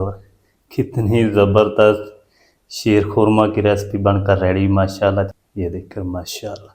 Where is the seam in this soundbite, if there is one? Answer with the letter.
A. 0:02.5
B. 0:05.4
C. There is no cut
B